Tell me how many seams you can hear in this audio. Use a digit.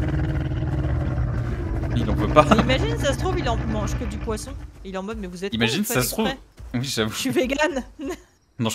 0